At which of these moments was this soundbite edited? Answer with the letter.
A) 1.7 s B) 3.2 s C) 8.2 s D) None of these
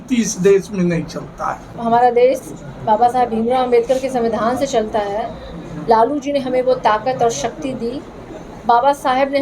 A